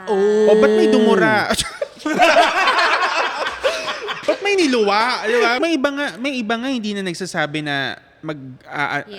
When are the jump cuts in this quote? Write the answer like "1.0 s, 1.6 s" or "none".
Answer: 5.6 s